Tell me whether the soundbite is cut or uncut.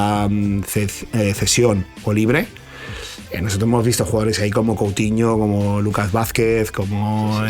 uncut